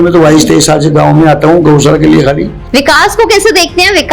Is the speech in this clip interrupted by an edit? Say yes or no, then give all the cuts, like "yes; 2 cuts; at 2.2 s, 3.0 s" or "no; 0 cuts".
yes; 1 cut; at 2.5 s